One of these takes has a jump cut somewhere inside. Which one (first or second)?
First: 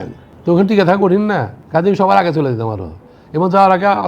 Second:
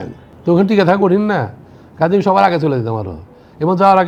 first